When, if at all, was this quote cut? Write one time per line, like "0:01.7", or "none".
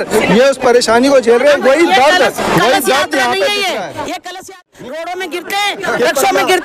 0:04.4